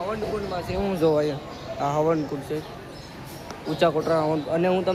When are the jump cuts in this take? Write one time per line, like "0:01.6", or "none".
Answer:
none